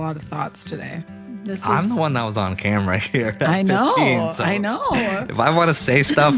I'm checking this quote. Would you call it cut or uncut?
cut